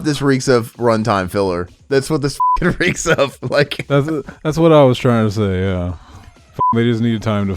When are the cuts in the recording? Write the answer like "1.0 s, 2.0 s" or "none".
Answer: 3.8 s